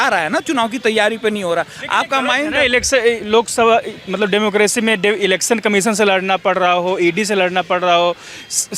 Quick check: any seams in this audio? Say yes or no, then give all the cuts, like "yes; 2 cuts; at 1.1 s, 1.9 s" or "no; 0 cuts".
no; 0 cuts